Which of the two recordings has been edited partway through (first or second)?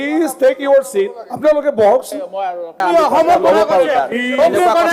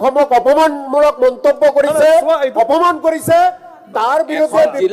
first